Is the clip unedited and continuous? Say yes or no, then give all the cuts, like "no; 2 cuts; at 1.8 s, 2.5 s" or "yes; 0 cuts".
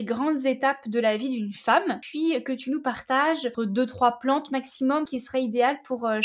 no; 3 cuts; at 2.0 s, 3.5 s, 5.1 s